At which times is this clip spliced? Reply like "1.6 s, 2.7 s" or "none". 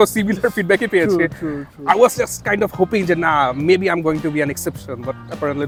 none